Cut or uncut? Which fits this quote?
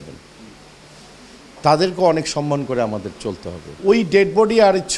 cut